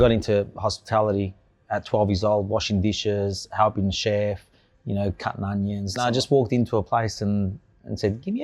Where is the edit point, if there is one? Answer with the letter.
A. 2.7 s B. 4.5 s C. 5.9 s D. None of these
C